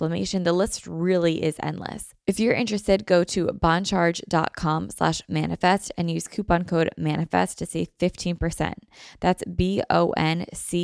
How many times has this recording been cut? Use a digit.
1